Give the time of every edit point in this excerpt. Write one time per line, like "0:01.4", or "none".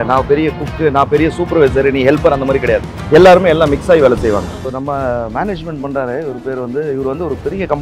0:04.6